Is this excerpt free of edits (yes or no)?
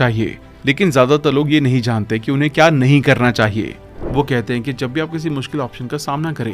no